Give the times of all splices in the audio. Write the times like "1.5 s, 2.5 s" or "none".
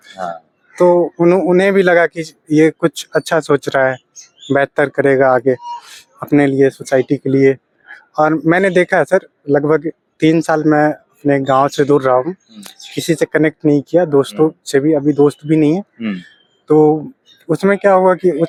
none